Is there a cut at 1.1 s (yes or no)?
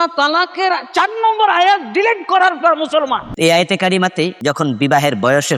no